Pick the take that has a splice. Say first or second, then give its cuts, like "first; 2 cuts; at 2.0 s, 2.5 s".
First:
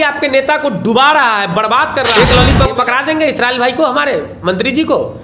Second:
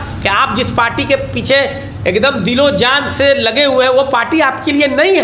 first; 1 cut; at 2.1 s